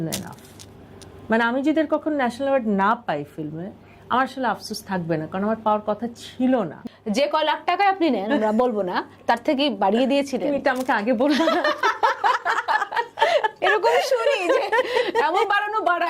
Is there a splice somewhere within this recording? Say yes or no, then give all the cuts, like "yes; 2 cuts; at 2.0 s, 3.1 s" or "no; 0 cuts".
yes; 1 cut; at 6.8 s